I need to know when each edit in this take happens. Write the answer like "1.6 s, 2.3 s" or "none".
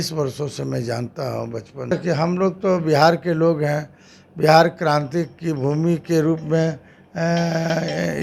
1.9 s